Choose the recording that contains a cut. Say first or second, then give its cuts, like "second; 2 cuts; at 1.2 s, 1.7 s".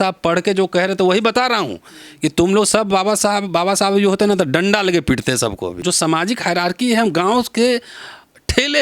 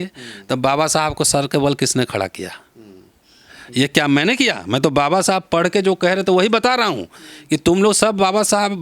first; 1 cut; at 5.8 s